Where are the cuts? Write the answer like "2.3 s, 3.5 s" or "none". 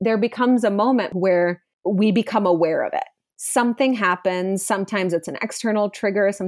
1.1 s